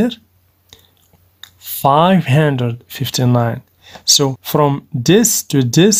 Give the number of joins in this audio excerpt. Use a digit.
2